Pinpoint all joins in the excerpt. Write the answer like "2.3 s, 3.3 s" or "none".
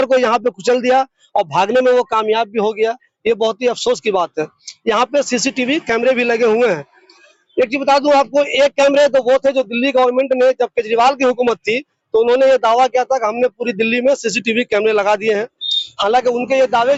none